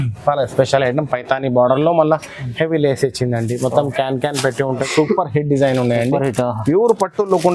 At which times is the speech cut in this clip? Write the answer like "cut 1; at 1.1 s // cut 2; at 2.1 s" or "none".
cut 1; at 4.9 s